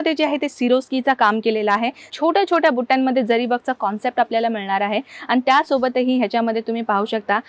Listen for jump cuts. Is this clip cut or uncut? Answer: cut